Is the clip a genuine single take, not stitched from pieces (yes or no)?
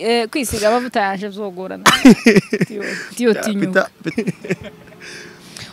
no